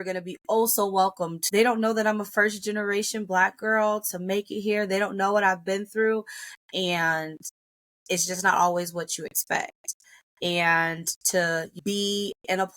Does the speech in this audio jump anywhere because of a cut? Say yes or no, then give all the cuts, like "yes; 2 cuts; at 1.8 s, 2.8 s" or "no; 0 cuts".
yes; 2 cuts; at 1.4 s, 11.7 s